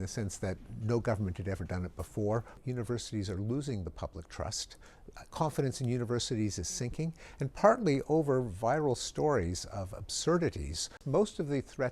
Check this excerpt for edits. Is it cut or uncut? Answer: cut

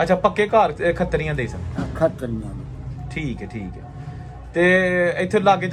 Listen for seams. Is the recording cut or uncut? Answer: uncut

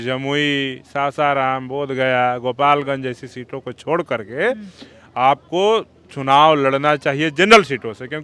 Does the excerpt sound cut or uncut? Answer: uncut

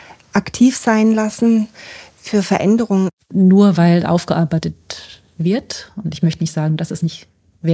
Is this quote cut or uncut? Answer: cut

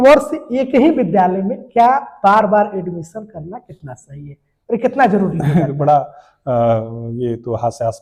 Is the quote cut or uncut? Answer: uncut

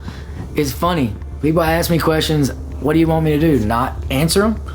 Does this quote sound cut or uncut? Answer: uncut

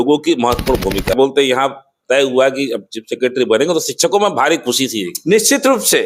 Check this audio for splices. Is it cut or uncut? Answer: cut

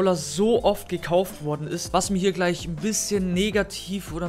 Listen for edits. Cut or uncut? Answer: cut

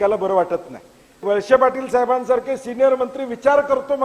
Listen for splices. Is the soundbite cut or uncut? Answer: cut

